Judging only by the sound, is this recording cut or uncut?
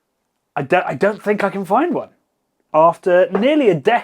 cut